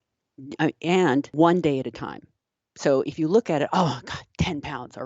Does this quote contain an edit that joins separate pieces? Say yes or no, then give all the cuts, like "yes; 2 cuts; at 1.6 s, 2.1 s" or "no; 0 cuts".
yes; 1 cut; at 1.3 s